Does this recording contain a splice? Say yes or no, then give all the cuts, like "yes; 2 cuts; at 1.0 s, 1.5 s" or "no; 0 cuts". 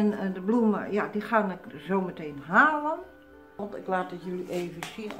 yes; 1 cut; at 3.6 s